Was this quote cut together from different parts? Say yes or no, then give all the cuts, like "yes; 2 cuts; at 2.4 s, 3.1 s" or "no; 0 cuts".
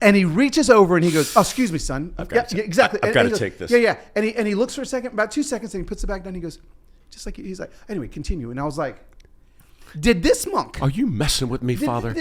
no; 0 cuts